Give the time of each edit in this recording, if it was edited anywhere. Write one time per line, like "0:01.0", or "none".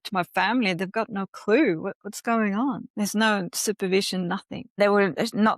0:02.9
0:04.8